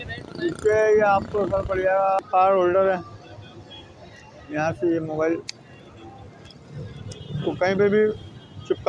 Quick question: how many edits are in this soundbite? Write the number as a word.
one